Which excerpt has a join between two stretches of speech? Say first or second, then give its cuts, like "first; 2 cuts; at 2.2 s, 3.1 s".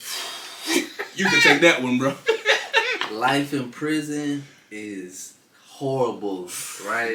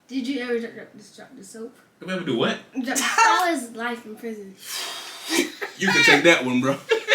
second; 1 cut; at 3.3 s